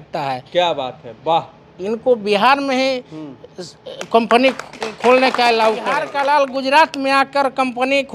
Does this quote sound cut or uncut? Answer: cut